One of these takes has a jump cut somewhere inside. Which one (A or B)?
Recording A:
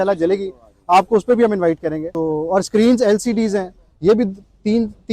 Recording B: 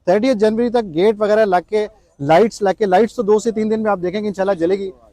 A